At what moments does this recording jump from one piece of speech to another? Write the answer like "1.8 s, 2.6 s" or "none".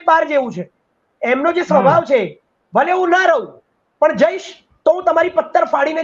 none